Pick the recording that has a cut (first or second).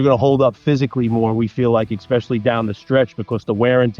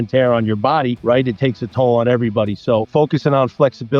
second